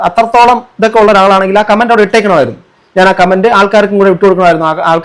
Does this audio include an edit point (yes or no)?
no